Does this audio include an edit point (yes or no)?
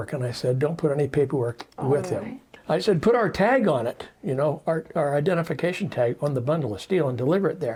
no